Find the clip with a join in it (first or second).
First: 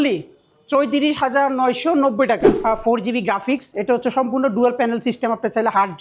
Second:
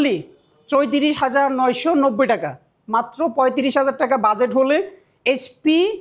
first